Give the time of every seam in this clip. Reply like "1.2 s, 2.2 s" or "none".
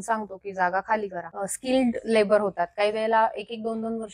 1.2 s